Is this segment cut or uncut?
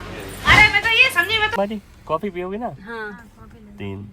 cut